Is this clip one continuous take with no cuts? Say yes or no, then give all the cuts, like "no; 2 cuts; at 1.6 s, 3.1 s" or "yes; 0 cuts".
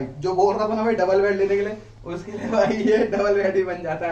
yes; 0 cuts